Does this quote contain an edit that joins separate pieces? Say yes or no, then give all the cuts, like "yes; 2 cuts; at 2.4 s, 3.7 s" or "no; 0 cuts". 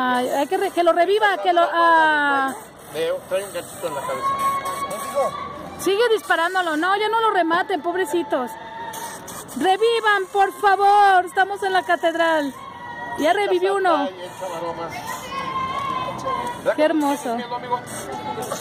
no; 0 cuts